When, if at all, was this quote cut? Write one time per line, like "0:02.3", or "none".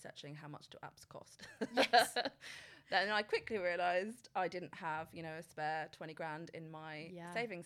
none